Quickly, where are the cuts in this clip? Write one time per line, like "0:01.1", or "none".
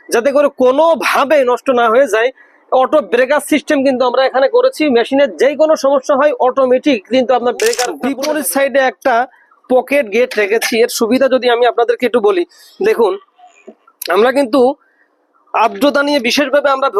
0:08.0